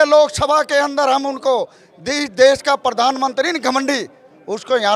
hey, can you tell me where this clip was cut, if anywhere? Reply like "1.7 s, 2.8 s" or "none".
none